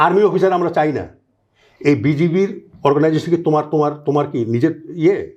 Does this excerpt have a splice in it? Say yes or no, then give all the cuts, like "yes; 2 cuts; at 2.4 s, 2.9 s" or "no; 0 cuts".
no; 0 cuts